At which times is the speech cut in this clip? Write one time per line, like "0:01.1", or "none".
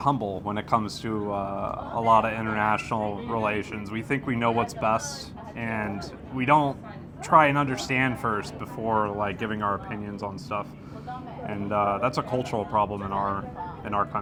none